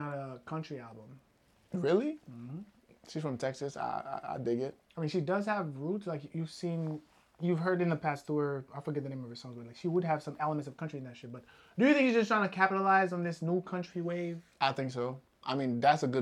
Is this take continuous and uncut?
yes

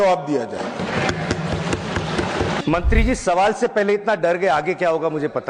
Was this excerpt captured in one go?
no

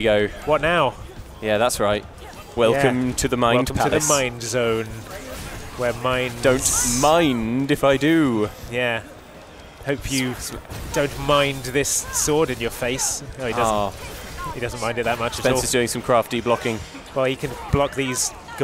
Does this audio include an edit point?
no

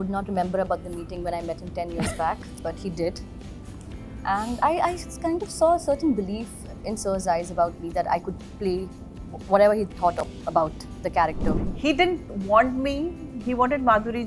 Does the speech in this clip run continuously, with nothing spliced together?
no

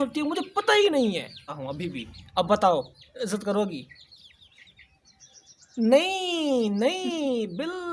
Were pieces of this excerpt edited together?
yes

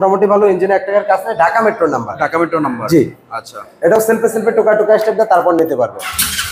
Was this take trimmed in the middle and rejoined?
no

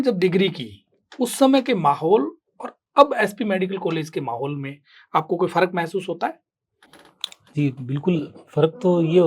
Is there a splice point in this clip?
no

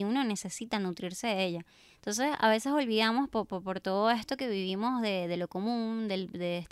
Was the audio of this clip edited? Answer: no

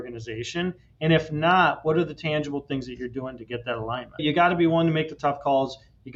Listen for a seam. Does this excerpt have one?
yes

